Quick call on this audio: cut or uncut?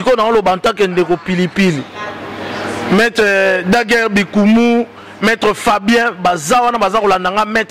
uncut